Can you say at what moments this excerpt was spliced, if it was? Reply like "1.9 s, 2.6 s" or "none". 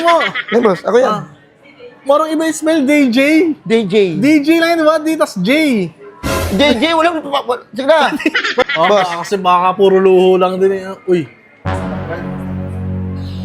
8.7 s